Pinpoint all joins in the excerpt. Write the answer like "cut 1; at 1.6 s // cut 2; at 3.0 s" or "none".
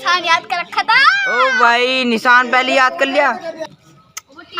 cut 1; at 3.7 s